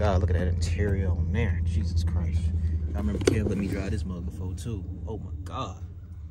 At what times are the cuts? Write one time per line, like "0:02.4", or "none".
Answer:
none